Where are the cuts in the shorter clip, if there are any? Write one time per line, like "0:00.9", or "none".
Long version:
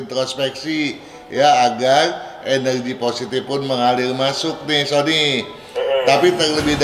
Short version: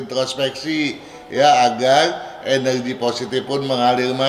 none